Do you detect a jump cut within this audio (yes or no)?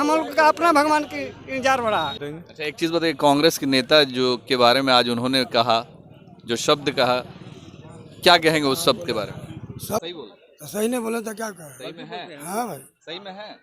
yes